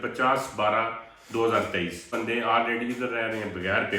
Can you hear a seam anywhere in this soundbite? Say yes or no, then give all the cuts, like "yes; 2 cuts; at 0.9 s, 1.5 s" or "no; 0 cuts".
yes; 1 cut; at 2.1 s